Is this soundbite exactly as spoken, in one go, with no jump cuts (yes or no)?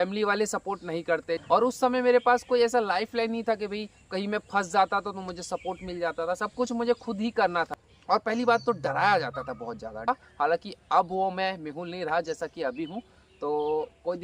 no